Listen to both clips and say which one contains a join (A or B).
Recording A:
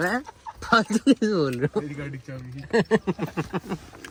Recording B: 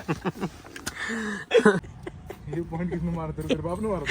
B